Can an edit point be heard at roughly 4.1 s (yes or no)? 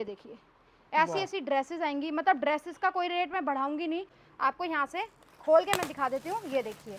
yes